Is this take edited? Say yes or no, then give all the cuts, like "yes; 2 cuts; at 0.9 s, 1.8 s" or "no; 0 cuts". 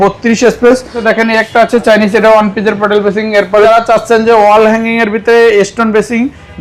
yes; 2 cuts; at 1.0 s, 3.7 s